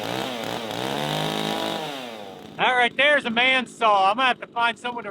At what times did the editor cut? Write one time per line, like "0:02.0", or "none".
0:02.3

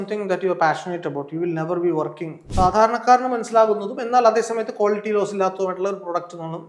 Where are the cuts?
0:02.5

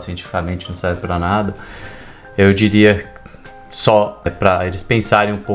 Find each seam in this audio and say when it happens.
0:04.3

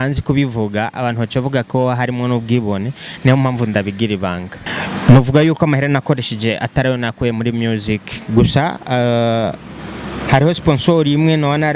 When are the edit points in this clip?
0:04.5

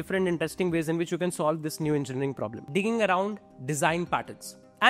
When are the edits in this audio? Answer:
0:02.5
0:03.5

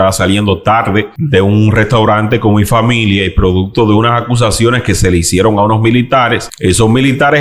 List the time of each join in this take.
0:01.2
0:06.5

